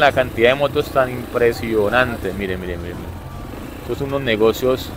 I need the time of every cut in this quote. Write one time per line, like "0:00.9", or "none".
none